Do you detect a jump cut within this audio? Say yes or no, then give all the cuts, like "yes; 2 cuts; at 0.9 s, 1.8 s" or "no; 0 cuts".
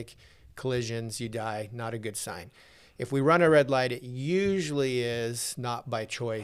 no; 0 cuts